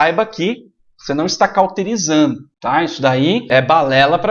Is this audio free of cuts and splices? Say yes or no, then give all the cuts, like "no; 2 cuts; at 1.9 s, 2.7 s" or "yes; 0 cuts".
no; 2 cuts; at 2.5 s, 3.5 s